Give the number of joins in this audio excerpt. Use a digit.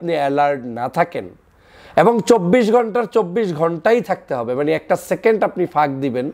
0